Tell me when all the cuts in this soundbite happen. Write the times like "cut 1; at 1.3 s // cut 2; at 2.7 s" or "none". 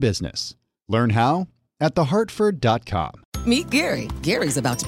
cut 1; at 3.2 s